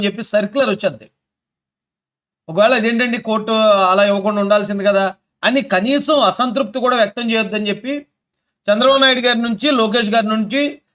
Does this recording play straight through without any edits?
yes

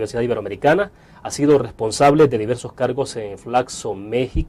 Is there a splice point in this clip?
no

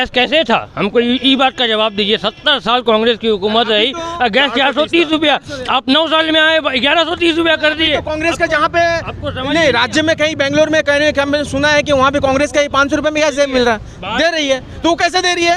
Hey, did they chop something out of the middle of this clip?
no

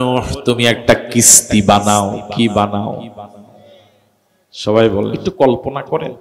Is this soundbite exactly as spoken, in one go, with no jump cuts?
no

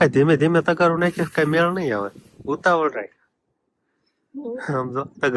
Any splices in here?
no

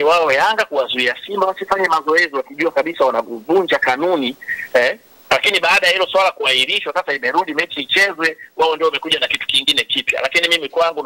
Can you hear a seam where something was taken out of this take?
no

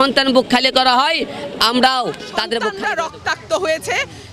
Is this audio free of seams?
no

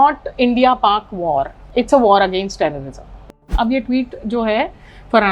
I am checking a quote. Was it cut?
yes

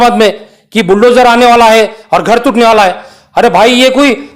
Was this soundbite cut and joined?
no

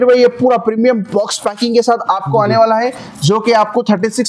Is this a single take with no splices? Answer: yes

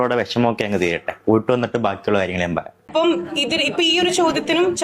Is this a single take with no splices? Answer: no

